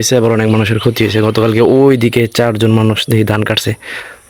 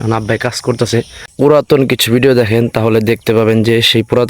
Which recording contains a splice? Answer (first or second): second